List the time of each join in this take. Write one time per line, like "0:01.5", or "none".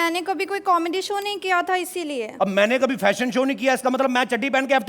0:02.3